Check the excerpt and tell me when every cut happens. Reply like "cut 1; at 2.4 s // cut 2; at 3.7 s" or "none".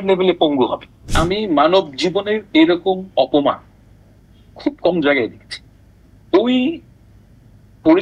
cut 1; at 1.0 s